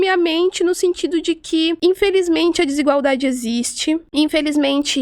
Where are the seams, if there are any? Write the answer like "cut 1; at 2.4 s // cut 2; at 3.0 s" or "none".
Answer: cut 1; at 1.8 s // cut 2; at 4.1 s